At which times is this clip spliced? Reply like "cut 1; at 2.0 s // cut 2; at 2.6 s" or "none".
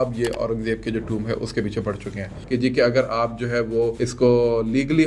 cut 1; at 2.3 s // cut 2; at 4.0 s